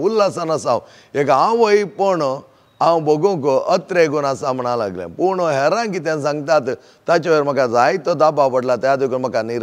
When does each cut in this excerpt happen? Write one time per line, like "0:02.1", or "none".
none